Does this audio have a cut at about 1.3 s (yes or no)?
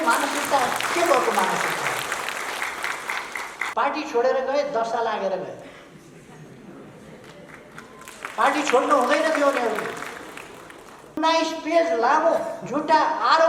no